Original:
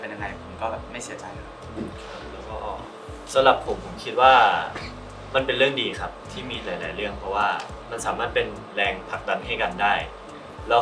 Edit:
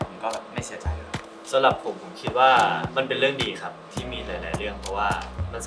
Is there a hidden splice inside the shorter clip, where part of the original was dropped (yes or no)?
yes